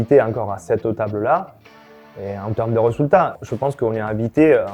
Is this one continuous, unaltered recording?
no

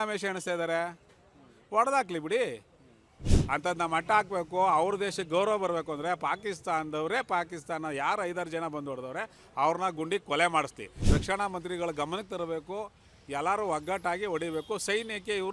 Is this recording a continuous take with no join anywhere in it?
no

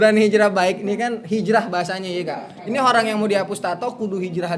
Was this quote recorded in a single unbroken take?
yes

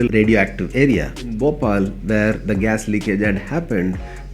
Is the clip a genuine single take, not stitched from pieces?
no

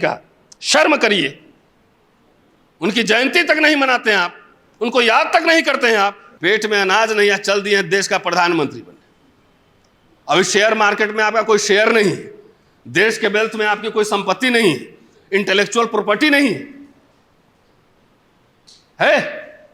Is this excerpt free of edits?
no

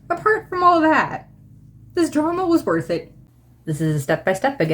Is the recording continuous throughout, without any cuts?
no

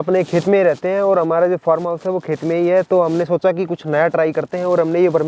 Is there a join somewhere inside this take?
no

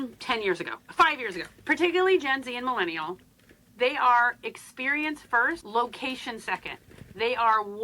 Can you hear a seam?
yes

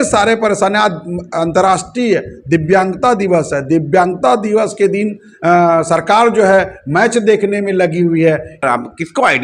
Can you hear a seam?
yes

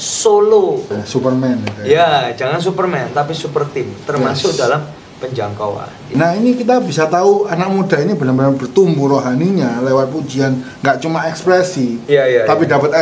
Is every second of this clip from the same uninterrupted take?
no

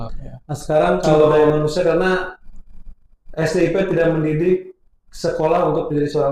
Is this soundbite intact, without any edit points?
no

